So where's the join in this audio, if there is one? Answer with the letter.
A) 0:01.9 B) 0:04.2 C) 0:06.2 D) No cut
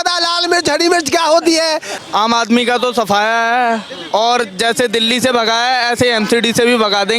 A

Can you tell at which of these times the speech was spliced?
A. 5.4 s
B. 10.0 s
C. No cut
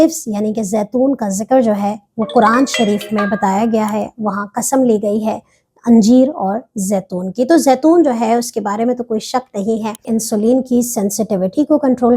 B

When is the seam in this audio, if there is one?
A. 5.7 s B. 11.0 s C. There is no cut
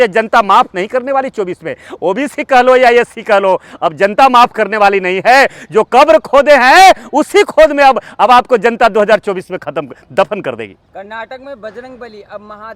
C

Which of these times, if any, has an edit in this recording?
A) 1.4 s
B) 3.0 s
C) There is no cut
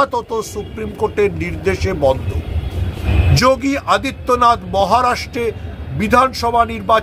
B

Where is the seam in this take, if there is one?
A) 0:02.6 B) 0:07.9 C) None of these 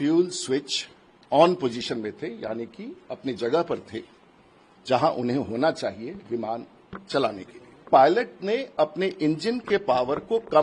B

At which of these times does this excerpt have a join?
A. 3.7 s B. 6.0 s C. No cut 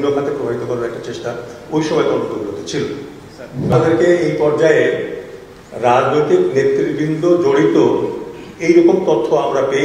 A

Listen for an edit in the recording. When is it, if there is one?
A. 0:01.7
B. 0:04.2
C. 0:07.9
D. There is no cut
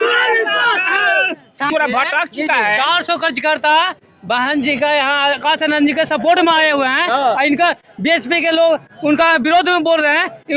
A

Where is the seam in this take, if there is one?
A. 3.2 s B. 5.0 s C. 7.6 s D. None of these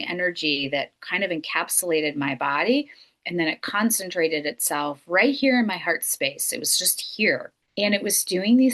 C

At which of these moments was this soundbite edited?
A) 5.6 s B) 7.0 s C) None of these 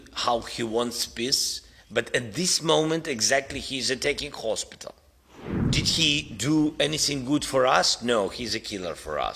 A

